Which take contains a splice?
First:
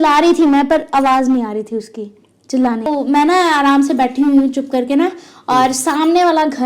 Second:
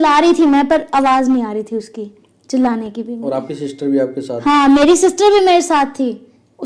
first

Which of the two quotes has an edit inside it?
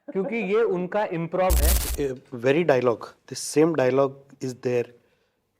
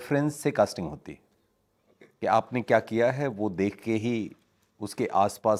first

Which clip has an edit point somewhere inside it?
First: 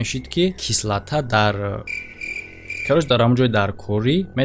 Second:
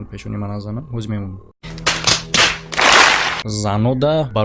second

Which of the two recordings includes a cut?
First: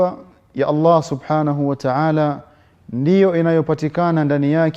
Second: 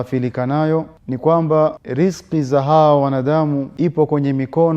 second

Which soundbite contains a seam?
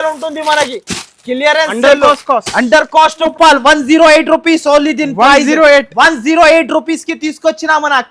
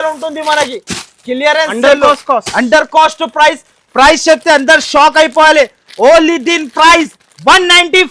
first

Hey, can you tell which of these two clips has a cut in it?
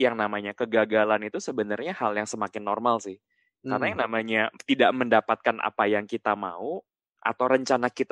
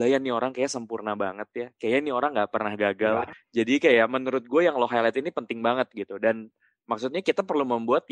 second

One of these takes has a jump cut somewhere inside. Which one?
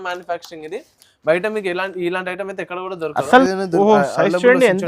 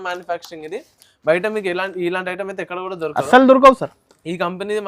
first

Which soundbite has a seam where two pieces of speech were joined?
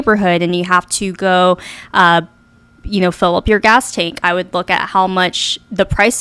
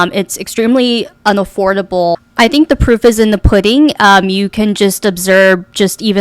second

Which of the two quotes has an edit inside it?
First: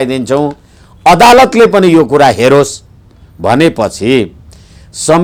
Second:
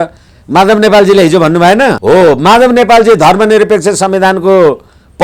second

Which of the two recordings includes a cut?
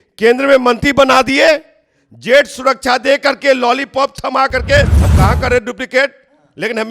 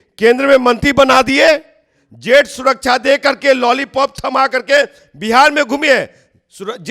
first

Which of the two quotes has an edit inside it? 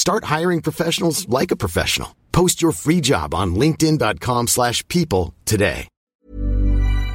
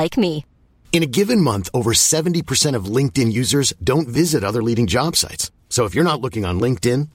first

